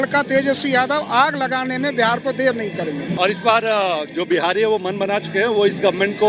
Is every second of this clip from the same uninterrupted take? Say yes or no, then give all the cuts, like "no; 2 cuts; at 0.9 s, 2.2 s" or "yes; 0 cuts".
no; 1 cut; at 3.1 s